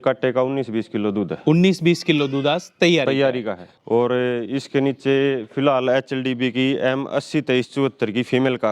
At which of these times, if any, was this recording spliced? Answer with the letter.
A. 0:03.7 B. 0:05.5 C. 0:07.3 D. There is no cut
A